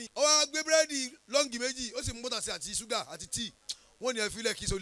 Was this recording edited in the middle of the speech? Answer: no; 0 cuts

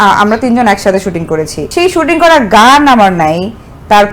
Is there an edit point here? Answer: yes; 1 cut; at 1.6 s

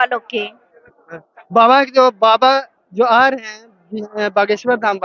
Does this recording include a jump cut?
no; 0 cuts

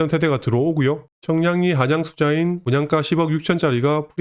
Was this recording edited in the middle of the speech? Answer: yes; 2 cuts; at 1.1 s, 2.6 s

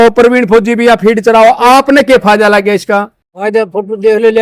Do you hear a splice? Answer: no; 0 cuts

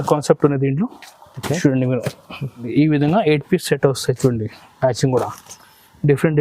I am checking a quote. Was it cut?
yes; 1 cut; at 2.7 s

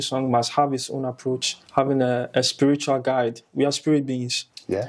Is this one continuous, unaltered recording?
no; 1 cut; at 1.5 s

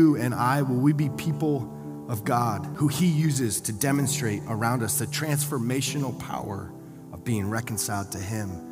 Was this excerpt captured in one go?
no; 1 cut; at 2.7 s

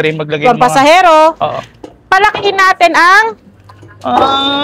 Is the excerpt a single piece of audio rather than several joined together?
yes; 0 cuts

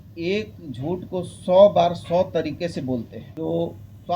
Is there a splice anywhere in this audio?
yes; 1 cut; at 3.2 s

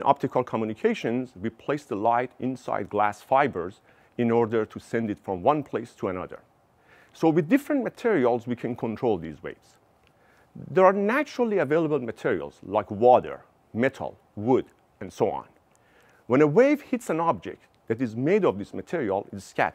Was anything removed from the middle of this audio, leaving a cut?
no; 0 cuts

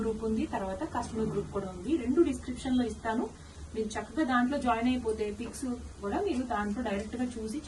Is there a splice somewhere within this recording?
no; 0 cuts

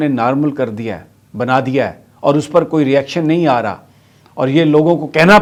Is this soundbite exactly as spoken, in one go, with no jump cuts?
yes; 0 cuts

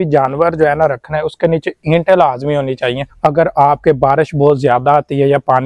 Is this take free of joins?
yes; 0 cuts

